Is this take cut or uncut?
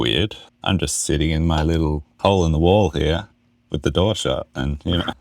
uncut